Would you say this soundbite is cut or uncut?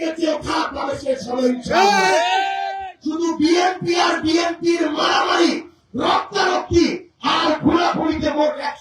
cut